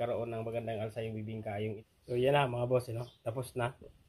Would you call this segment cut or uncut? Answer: cut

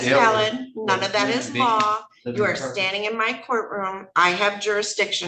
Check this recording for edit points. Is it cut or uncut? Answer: uncut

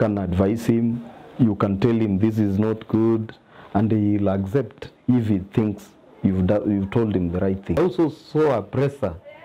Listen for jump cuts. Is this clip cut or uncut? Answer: cut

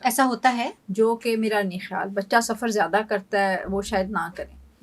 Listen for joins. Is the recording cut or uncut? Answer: uncut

